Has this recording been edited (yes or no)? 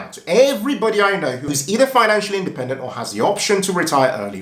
no